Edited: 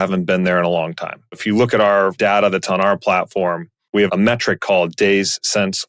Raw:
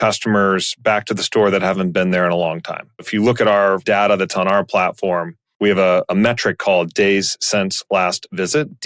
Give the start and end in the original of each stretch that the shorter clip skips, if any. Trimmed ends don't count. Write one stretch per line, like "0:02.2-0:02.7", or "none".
0:05.7-0:06.1